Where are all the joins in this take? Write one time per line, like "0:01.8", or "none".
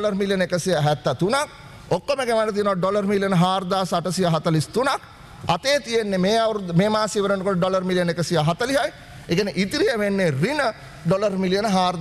none

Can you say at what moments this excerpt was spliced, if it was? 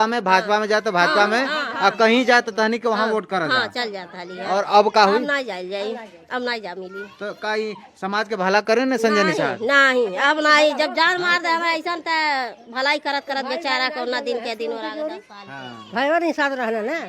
none

